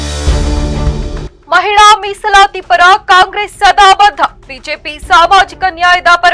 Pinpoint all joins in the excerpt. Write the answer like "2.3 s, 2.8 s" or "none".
1.3 s